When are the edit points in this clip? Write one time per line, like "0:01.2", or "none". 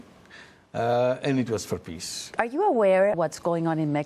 0:02.3
0:03.2